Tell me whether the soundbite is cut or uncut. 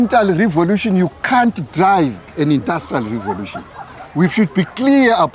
uncut